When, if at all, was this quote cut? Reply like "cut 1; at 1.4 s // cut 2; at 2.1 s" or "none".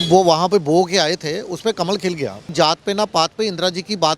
cut 1; at 2.5 s